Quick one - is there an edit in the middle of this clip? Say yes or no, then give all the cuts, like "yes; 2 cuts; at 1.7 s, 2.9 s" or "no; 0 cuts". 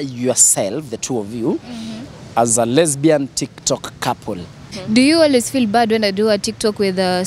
yes; 1 cut; at 4.7 s